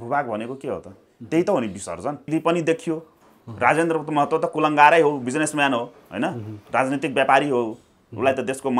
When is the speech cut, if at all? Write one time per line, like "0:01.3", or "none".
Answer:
0:02.3

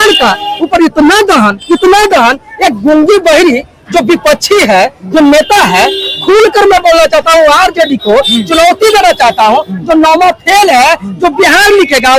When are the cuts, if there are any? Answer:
none

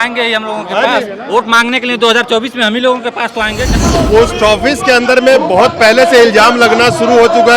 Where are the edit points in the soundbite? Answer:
0:03.8

